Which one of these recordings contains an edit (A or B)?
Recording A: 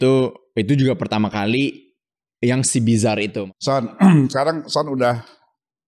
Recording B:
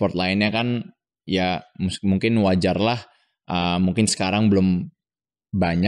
A